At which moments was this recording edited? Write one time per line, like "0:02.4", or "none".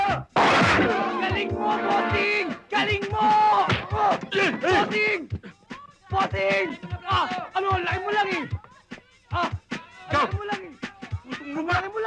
none